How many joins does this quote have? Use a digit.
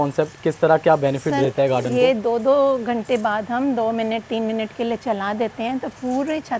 0